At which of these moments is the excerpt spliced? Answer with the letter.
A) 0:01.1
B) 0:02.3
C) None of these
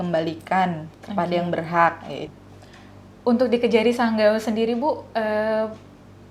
B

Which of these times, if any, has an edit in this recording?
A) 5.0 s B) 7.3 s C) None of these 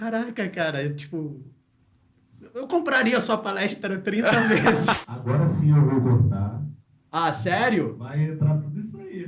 A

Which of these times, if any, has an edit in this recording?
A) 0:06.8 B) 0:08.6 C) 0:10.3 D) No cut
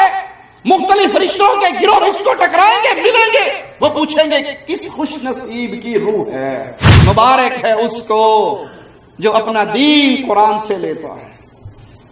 A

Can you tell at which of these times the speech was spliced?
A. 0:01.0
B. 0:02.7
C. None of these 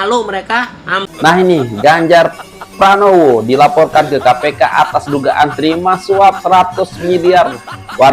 A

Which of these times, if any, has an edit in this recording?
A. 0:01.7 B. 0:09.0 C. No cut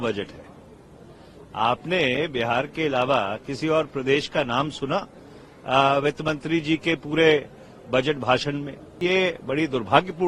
B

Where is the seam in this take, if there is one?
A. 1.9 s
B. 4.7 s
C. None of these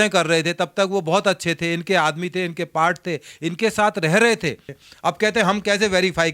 B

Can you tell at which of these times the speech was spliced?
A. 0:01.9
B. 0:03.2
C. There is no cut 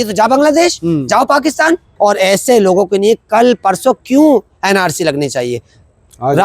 A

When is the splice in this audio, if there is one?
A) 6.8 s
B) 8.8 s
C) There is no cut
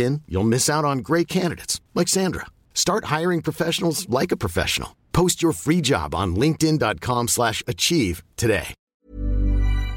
B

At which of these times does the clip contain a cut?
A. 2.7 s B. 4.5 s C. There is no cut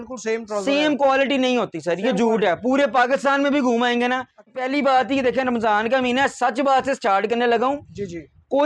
B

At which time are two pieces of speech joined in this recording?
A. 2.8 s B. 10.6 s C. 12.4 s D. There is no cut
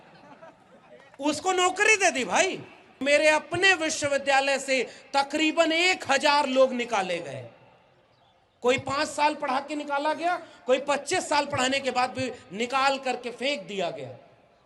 A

